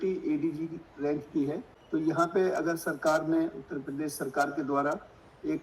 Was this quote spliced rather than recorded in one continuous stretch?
yes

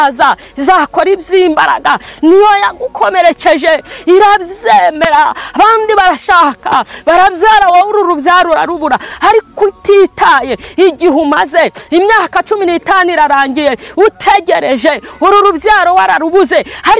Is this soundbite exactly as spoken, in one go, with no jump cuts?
yes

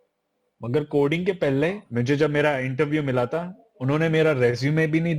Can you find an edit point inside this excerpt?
yes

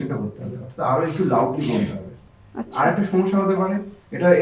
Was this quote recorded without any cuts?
yes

